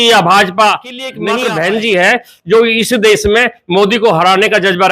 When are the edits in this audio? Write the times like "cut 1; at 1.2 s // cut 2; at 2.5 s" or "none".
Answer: cut 1; at 1.1 s